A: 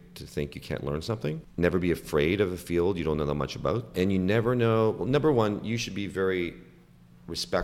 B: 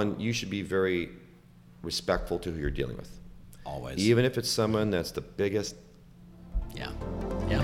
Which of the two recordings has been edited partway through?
A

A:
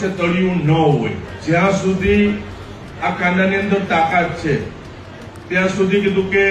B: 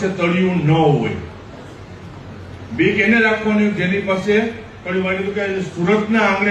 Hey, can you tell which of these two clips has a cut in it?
A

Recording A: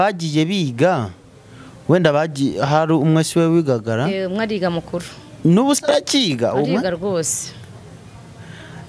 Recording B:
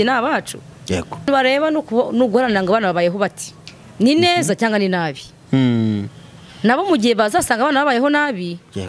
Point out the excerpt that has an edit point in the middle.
B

